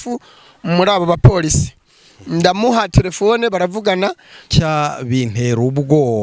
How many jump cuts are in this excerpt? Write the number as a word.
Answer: one